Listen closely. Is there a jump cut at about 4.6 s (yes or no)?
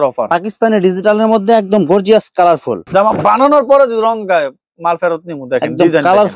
no